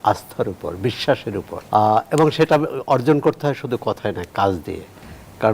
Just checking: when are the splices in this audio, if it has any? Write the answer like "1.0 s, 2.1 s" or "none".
1.6 s